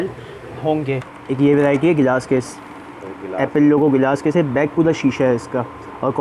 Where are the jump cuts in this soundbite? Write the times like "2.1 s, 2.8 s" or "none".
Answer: 1.0 s